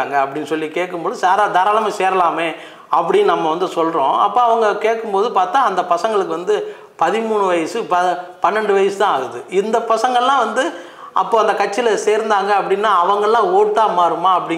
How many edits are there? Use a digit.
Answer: 0